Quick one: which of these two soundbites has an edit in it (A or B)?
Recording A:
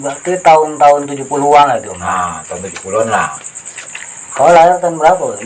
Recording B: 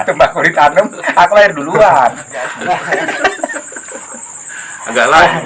B